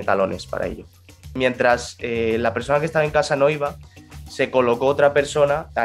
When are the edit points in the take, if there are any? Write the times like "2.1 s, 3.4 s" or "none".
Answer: 1.3 s